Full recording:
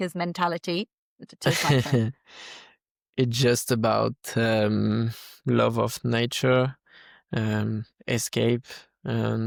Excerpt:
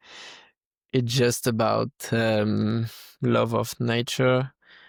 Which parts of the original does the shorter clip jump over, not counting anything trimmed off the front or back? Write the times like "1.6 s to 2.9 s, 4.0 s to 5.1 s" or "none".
none